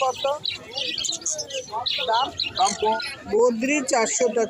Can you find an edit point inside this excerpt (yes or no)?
yes